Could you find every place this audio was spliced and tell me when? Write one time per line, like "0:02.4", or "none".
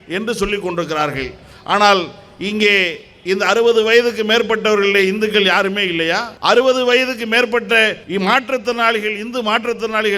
0:06.3
0:08.0